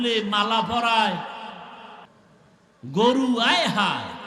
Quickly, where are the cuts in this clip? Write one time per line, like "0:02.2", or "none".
0:02.0